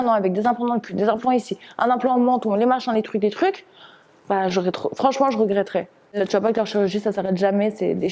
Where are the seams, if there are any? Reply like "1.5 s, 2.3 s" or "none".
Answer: 6.2 s